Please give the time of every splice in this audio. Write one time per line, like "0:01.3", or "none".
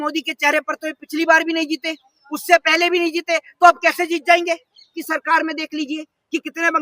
0:05.0

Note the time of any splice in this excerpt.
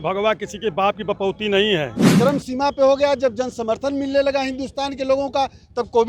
0:02.0

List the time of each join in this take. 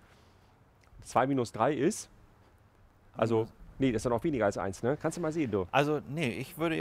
none

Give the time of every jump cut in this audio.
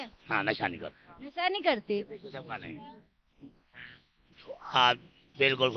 0:03.9

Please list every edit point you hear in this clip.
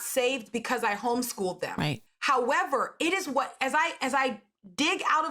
0:02.1

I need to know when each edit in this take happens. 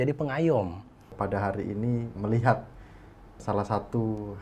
0:01.1
0:02.1
0:03.4

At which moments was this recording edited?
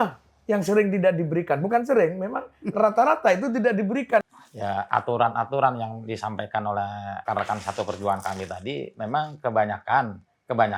0:04.3
0:07.2

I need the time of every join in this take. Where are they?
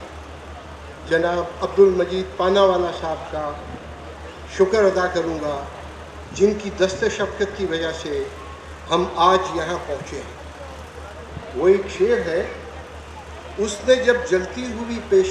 none

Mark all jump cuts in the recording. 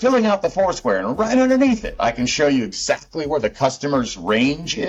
none

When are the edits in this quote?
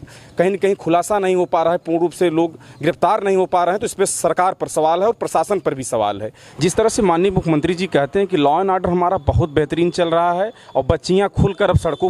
0:06.4

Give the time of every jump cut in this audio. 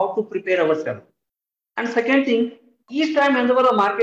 0:02.8

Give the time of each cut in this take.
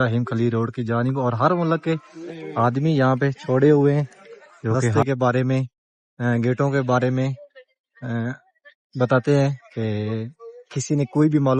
0:04.9

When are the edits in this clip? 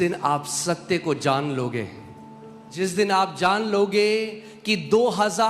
0:02.7

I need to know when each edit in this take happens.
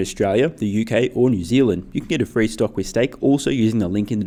none

